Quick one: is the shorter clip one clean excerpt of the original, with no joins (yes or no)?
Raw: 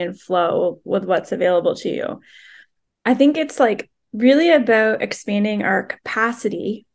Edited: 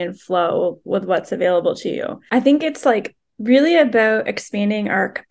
no